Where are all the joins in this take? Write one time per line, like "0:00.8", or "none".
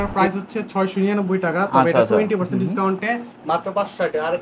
none